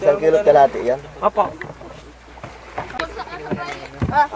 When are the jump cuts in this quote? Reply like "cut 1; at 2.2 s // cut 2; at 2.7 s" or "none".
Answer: cut 1; at 3.0 s